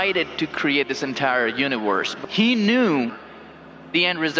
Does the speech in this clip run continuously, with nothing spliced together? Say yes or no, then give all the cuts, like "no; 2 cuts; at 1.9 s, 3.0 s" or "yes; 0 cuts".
no; 1 cut; at 2.2 s